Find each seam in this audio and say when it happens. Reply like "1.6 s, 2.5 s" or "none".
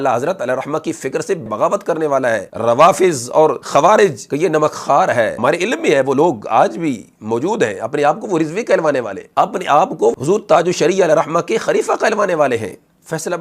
1.4 s, 2.5 s, 3.6 s, 4.2 s, 5.3 s, 9.2 s